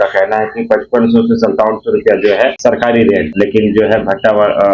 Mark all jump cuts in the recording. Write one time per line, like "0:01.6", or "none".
0:02.6
0:03.3